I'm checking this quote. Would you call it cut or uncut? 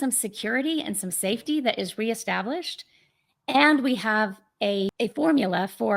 cut